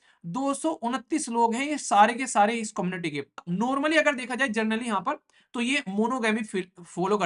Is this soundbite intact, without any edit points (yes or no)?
no